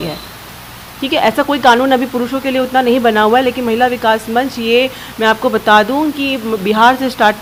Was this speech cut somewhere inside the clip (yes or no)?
no